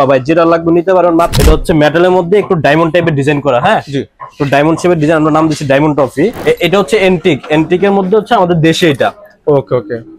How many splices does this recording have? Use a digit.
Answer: 2